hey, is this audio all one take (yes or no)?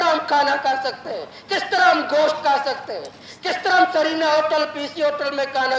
yes